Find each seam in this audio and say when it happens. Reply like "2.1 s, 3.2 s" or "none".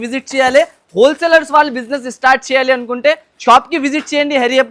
none